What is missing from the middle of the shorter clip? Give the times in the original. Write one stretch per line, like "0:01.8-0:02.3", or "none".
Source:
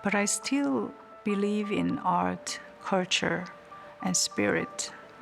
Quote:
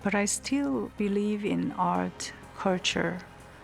0:00.9-0:01.2